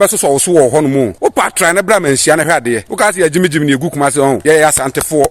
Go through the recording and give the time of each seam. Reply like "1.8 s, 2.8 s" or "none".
1.1 s, 2.9 s, 4.4 s